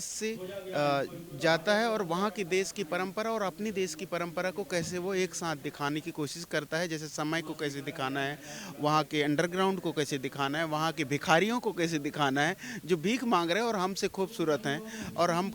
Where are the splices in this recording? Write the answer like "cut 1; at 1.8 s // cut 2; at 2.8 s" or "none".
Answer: none